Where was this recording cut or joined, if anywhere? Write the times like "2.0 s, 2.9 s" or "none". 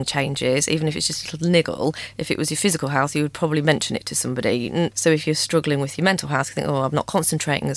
4.9 s